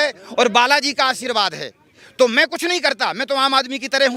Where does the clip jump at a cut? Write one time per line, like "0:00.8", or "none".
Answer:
none